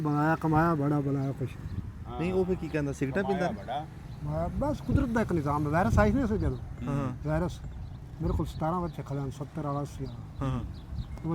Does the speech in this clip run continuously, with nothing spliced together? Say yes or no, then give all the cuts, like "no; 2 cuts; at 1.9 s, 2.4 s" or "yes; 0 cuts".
yes; 0 cuts